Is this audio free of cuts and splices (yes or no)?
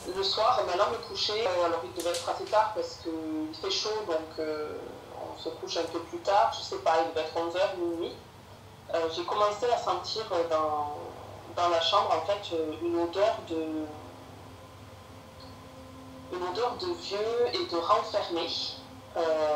no